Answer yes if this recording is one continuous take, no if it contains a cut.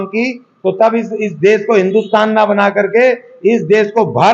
yes